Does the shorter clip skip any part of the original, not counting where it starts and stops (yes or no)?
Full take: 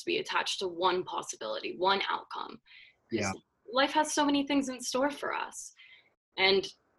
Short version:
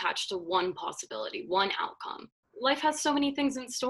yes